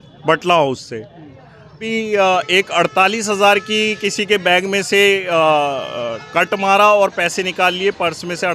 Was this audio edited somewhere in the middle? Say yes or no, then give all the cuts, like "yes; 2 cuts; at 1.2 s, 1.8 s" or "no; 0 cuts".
yes; 1 cut; at 1.8 s